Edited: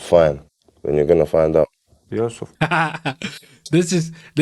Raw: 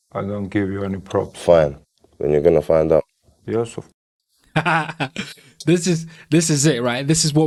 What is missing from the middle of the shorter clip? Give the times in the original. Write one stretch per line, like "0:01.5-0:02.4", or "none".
0:03.8-0:04.4